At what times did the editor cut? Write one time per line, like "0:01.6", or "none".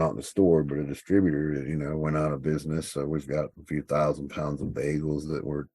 0:03.6